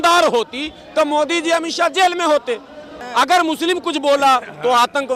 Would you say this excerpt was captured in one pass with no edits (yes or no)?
no